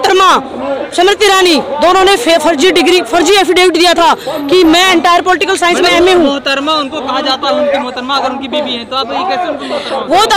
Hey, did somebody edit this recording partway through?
no; 0 cuts

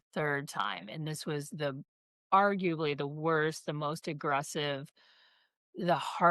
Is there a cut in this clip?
no; 0 cuts

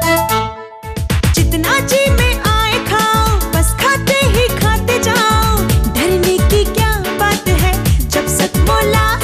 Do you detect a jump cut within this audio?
no; 0 cuts

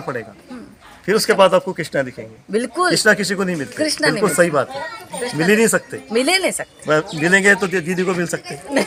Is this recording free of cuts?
yes; 0 cuts

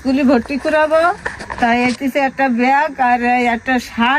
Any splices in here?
no; 0 cuts

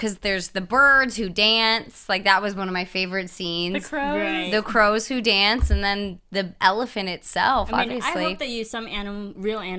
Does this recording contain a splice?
yes; 1 cut; at 1.3 s

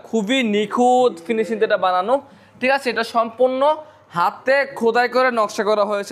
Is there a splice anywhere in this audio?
no; 0 cuts

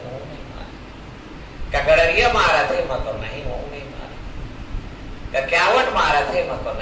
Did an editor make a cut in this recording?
no; 0 cuts

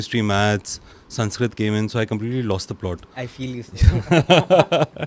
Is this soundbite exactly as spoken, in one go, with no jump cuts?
yes; 0 cuts

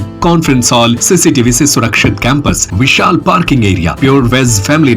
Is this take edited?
yes; 3 cuts; at 1.0 s, 2.7 s, 3.9 s

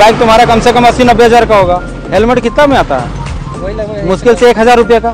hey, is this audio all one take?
yes; 0 cuts

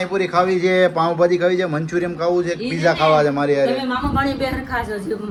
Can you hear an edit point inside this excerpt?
no; 0 cuts

